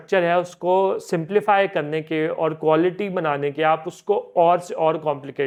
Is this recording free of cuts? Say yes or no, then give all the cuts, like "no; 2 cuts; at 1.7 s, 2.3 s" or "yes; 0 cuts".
yes; 0 cuts